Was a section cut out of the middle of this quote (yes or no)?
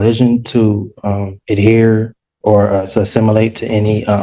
no